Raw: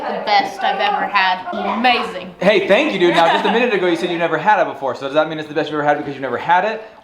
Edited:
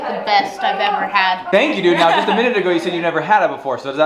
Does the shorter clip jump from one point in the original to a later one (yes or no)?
yes